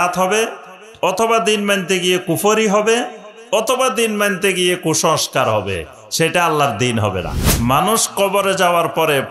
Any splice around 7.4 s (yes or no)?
yes